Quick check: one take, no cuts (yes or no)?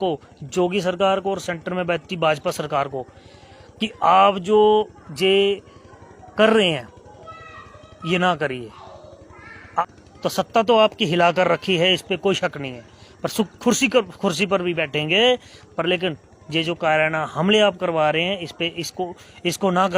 no